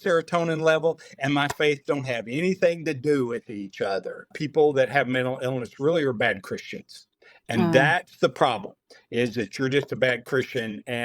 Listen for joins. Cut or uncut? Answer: cut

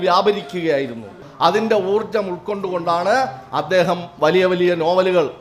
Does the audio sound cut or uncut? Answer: cut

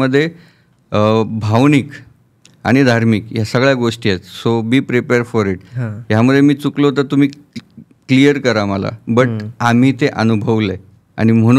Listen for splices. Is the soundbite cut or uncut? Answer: uncut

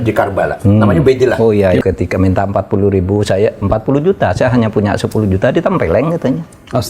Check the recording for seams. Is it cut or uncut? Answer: cut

